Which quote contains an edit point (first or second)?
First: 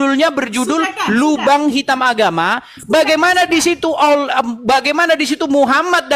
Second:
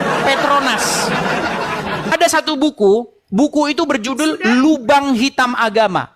second